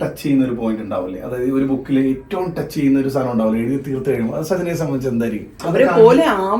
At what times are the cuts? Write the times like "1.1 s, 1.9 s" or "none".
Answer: 5.5 s